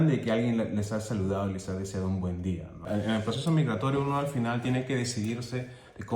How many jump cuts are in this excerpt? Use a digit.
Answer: 1